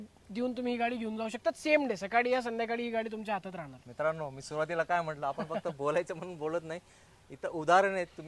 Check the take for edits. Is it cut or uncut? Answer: uncut